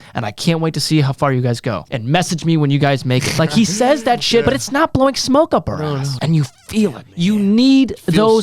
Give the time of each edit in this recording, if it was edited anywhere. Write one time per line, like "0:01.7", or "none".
0:01.9
0:03.3
0:04.4
0:06.1
0:07.0